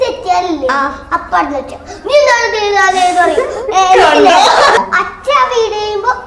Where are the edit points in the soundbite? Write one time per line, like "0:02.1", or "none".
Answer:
0:04.8